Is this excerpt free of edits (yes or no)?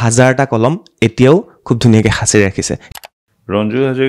no